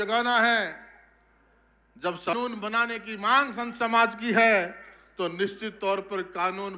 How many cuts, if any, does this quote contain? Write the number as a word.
one